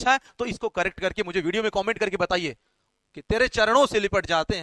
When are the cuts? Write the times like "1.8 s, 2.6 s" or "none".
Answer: 2.7 s